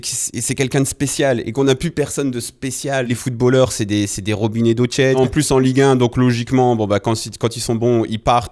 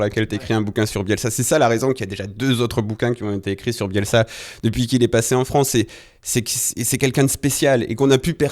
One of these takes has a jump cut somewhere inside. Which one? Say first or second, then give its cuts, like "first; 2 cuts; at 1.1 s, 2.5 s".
first; 2 cuts; at 3.1 s, 5.2 s